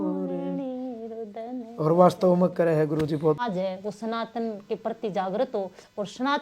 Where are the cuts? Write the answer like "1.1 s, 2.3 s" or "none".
3.4 s